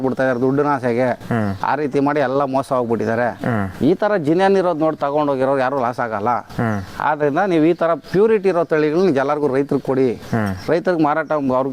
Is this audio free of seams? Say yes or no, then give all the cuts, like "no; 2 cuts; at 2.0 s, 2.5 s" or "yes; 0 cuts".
yes; 0 cuts